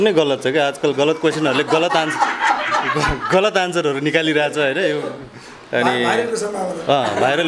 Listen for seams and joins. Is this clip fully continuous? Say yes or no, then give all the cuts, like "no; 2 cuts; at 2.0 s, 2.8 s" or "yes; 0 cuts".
yes; 0 cuts